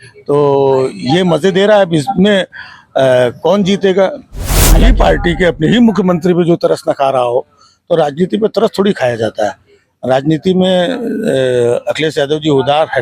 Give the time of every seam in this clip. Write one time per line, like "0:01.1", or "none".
0:04.7